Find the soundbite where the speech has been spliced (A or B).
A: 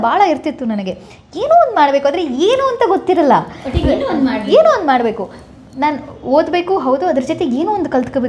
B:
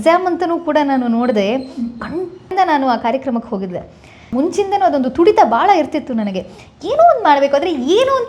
B